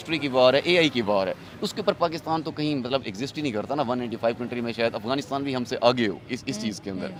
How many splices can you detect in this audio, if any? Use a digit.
0